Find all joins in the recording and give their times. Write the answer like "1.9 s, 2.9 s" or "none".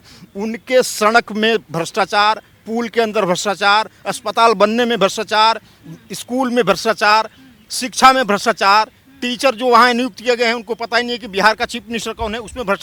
none